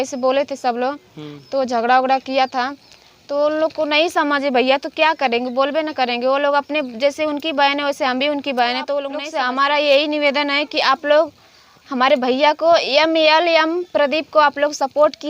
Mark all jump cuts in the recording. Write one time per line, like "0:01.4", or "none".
0:09.2